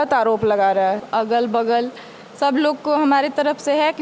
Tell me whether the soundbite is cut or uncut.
cut